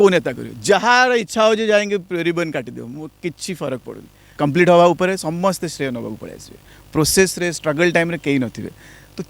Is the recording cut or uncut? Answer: cut